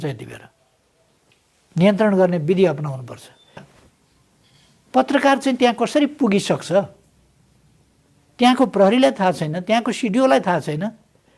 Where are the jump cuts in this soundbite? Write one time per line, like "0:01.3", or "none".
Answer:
0:03.7